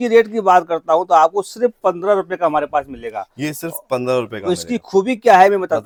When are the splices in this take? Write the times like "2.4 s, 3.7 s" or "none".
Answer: none